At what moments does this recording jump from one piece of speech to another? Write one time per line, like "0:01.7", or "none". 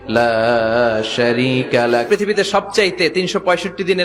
0:02.1